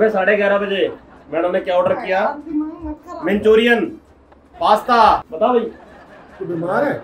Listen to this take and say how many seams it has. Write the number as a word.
one